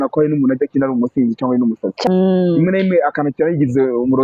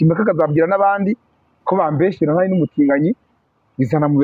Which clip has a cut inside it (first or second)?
first